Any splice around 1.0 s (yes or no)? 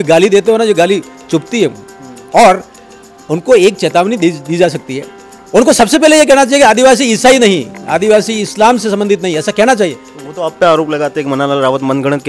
no